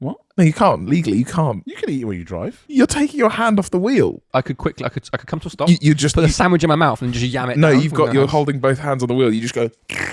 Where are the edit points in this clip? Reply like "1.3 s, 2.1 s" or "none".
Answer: 2.6 s, 4.2 s